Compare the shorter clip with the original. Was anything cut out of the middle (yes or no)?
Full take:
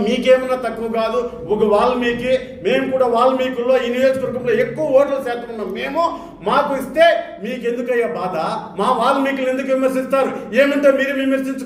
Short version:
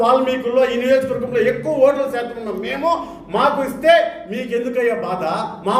no